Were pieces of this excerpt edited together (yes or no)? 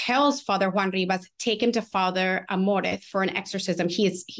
no